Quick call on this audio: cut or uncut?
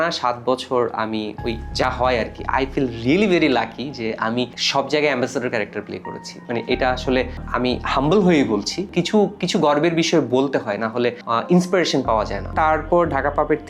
uncut